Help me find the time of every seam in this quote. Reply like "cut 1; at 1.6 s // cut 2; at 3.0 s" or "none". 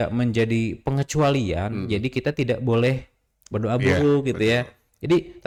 none